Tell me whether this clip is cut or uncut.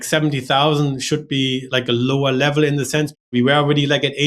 cut